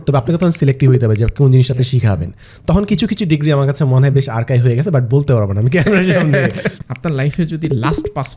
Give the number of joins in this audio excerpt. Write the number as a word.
one